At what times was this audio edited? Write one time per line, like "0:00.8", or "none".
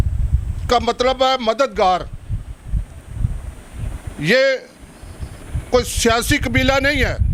none